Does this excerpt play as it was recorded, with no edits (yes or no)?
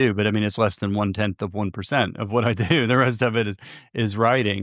yes